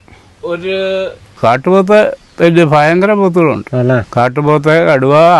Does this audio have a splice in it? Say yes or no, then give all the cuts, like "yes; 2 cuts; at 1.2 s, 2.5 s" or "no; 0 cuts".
yes; 2 cuts; at 1.3 s, 4.1 s